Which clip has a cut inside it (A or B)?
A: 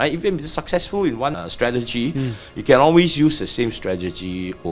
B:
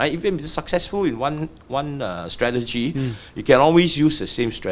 A